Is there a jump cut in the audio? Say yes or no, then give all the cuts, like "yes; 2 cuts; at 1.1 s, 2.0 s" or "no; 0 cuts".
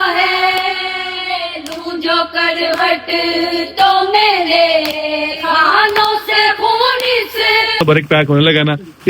yes; 1 cut; at 7.8 s